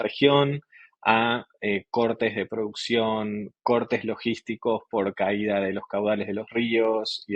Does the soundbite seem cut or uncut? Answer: uncut